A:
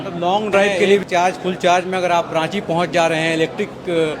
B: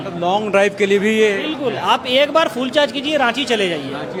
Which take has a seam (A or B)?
A